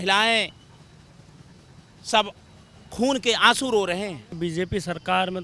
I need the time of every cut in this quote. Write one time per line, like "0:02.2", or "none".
0:04.3